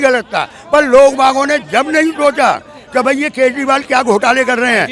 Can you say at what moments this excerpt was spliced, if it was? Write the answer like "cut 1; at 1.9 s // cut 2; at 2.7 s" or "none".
none